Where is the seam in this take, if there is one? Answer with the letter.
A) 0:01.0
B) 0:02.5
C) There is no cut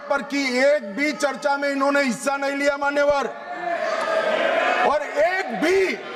C